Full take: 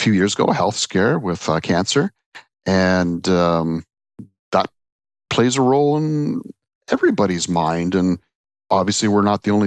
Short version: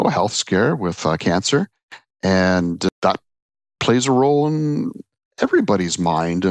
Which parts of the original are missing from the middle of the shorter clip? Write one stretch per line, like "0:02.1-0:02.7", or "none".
0:03.3-0:04.4